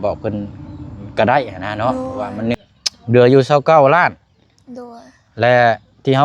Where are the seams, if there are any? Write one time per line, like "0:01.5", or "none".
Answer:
0:02.6